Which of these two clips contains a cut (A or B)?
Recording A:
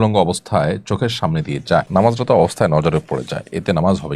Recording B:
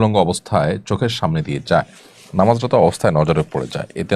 A